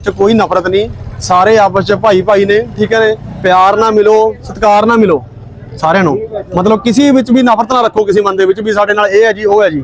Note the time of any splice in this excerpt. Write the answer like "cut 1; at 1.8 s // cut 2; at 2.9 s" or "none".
none